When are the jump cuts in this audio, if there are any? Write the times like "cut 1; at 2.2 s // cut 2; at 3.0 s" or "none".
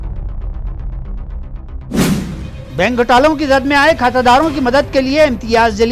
cut 1; at 2.5 s